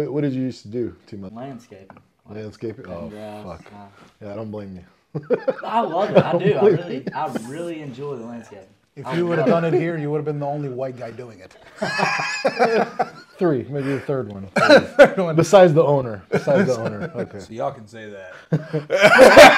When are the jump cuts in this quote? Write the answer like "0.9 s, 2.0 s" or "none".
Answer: 1.3 s